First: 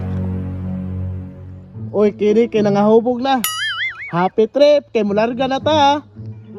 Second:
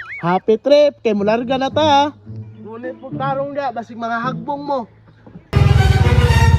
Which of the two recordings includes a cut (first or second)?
second